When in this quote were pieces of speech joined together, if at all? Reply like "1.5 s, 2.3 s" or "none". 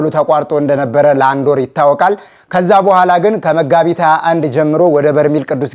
none